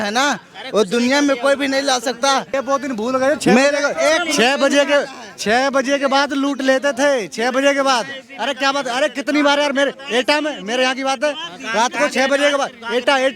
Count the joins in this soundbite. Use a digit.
1